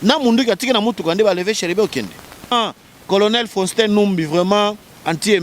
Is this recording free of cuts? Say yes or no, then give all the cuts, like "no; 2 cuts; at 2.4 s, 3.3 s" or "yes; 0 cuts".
no; 1 cut; at 2.5 s